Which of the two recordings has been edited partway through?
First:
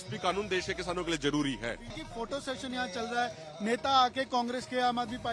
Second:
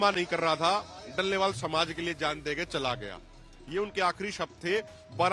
first; 1 cut; at 2.0 s

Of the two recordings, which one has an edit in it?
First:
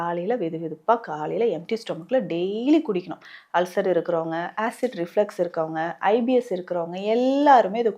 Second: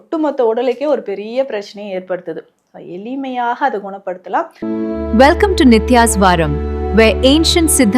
second; 1 cut; at 4.5 s

